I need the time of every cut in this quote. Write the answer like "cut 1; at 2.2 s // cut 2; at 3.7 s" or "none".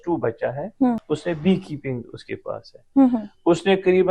cut 1; at 1.0 s